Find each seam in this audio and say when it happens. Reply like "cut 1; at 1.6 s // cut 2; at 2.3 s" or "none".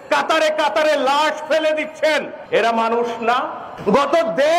cut 1; at 2.4 s // cut 2; at 3.6 s